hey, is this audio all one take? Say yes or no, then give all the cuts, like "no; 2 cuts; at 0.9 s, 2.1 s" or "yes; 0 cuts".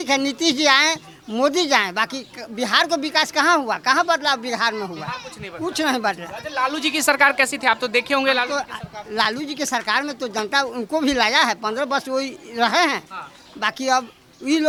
yes; 0 cuts